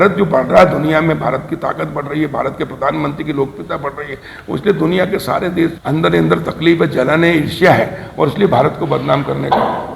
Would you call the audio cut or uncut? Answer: cut